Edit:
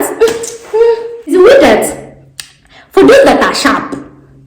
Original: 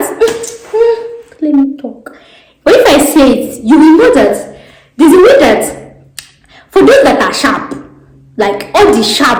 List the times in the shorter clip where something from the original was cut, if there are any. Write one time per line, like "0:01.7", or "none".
0:01.3